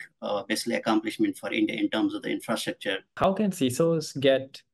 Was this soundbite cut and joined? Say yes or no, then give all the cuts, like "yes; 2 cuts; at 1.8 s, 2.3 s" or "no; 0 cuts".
yes; 1 cut; at 3.2 s